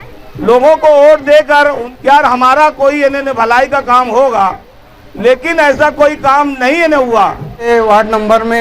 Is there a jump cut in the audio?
yes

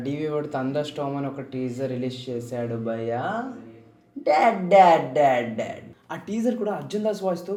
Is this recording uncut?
yes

